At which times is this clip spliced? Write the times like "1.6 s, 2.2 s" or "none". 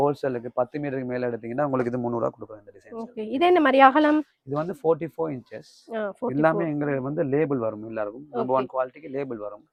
none